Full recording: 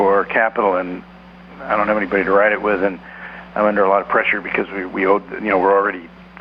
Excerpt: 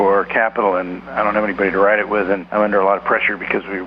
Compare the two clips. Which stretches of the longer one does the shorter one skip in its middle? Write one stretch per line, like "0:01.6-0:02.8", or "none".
0:01.0-0:01.5
0:03.0-0:03.5